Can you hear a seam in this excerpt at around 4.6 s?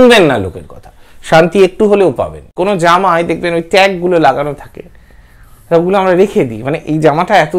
no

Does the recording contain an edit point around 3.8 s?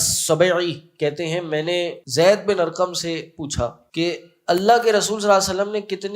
yes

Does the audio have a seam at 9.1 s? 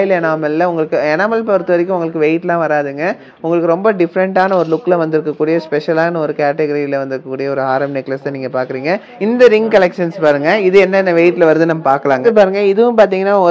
yes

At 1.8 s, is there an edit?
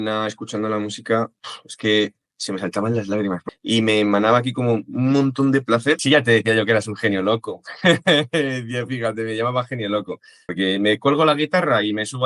no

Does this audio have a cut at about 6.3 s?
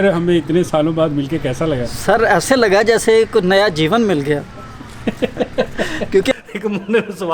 yes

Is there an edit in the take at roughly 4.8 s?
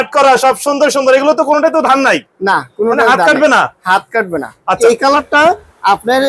yes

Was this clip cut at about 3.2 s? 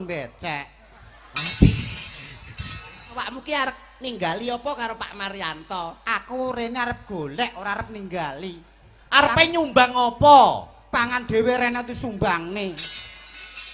yes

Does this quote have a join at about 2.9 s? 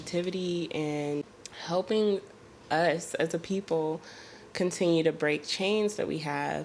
no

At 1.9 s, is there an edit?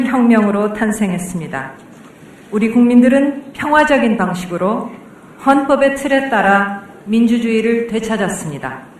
no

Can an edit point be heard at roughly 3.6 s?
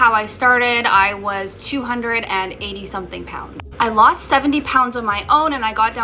no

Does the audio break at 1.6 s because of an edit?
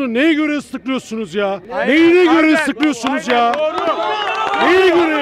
yes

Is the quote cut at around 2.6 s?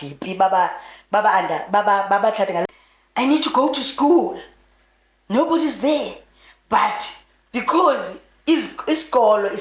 yes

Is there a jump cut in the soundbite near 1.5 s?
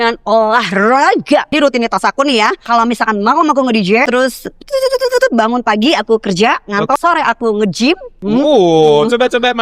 yes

